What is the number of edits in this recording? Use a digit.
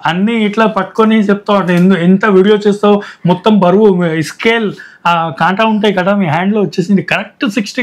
0